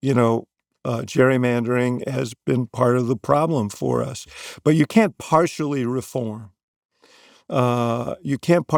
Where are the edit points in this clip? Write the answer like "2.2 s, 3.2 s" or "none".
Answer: none

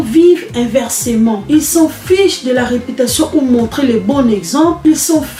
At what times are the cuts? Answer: none

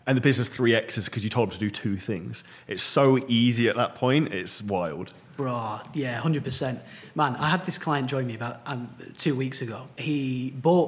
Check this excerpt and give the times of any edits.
10.0 s

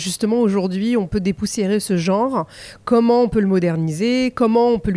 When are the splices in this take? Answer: none

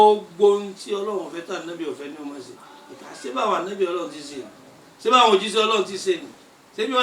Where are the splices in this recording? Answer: none

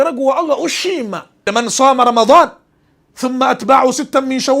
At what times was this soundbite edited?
1.5 s

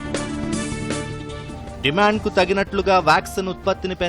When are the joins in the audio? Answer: 1.4 s

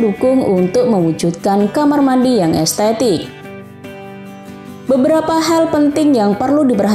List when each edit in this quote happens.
3.3 s, 4.9 s

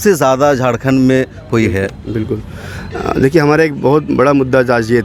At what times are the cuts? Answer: none

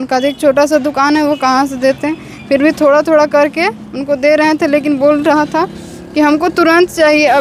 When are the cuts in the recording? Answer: none

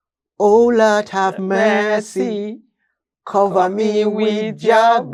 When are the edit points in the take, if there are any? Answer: none

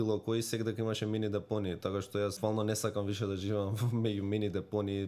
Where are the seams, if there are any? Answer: 2.4 s

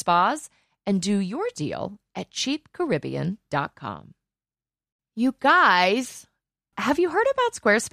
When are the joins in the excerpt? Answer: 4.9 s

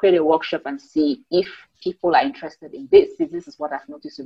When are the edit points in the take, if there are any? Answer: none

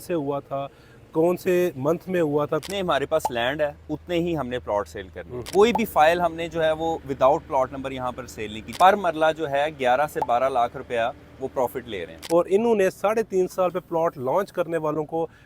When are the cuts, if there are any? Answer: 2.6 s, 5.4 s, 8.7 s, 12.1 s

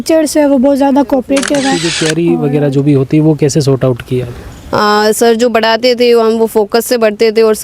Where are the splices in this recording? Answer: 1.9 s

